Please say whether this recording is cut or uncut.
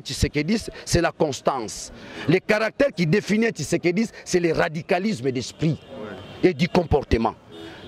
uncut